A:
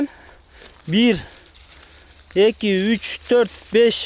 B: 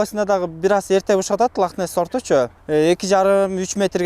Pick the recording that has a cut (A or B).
B